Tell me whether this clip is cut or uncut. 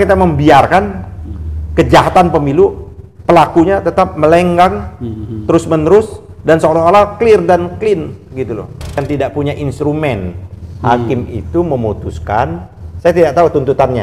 cut